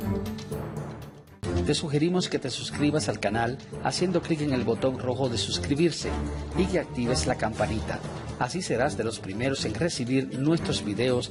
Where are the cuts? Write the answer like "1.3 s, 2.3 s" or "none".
none